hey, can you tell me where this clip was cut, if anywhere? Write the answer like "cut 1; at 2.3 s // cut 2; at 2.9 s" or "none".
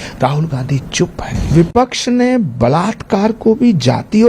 cut 1; at 1.5 s

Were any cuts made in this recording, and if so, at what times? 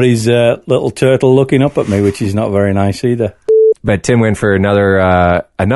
cut 1; at 3.6 s

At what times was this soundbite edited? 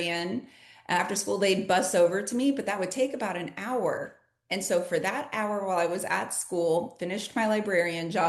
cut 1; at 1.0 s

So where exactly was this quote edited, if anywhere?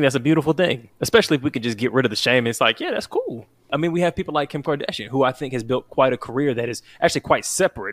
cut 1; at 0.9 s // cut 2; at 3.7 s

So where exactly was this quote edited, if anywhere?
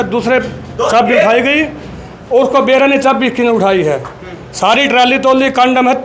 none

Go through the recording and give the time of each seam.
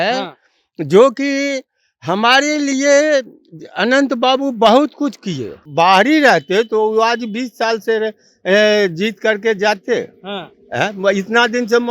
cut 1; at 5.6 s

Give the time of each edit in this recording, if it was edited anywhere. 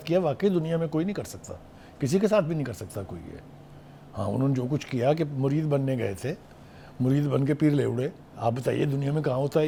none

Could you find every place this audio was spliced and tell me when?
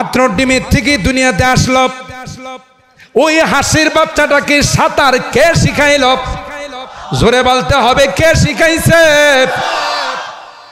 none

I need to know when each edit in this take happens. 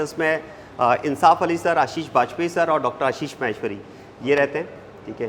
none

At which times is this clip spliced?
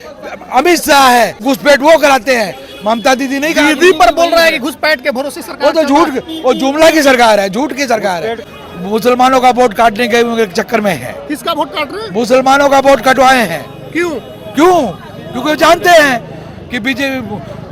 cut 1; at 1.4 s // cut 2; at 8.4 s

